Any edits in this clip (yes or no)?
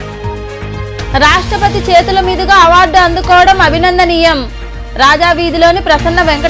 yes